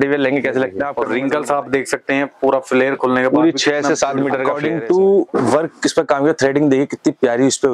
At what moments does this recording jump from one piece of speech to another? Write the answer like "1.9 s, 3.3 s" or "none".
1.0 s, 4.5 s